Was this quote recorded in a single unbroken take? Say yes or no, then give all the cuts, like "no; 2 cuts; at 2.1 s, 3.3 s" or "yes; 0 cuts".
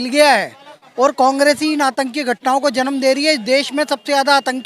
yes; 0 cuts